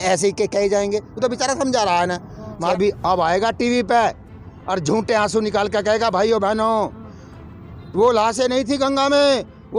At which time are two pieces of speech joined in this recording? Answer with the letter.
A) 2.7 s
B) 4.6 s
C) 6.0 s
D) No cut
A